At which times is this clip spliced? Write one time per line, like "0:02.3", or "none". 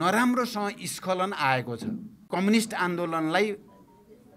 0:02.2